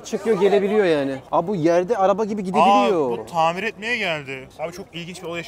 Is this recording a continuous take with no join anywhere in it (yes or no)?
no